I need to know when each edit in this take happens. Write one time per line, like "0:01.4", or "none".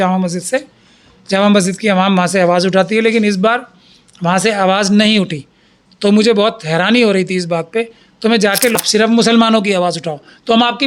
0:08.7